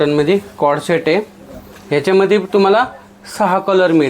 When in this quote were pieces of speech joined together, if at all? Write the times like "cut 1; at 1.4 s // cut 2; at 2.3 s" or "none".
none